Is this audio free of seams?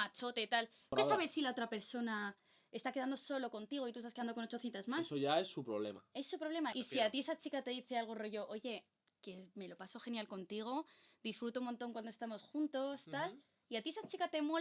no; 2 cuts; at 0.9 s, 6.7 s

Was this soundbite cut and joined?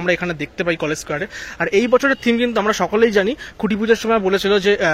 no; 0 cuts

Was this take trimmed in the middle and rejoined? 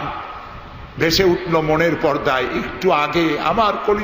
no; 0 cuts

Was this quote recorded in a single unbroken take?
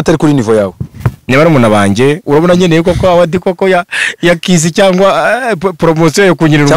no; 1 cut; at 2.2 s

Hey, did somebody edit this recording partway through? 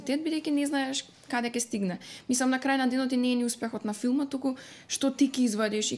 no; 0 cuts

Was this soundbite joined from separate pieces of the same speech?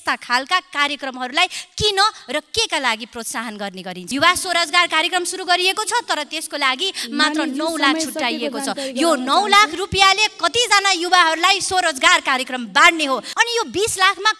yes; 2 cuts; at 4.0 s, 13.3 s

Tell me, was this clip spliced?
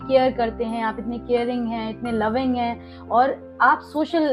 no; 0 cuts

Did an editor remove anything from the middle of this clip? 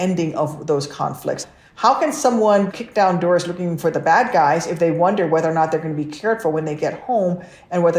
yes; 2 cuts; at 1.4 s, 2.7 s

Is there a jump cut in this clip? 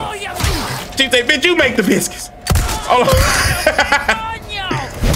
no; 0 cuts

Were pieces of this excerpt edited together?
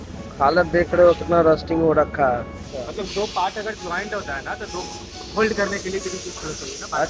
yes; 1 cut; at 2.7 s

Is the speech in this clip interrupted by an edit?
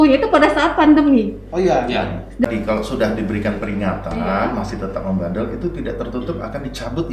yes; 1 cut; at 2.4 s

